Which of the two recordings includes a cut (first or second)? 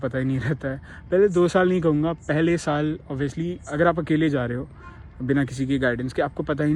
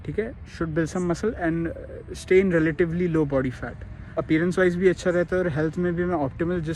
second